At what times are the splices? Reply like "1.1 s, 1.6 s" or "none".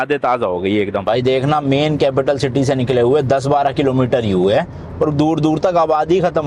1.0 s